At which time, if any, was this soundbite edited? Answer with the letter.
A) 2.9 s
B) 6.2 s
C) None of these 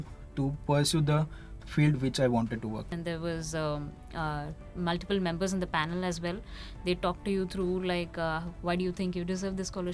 A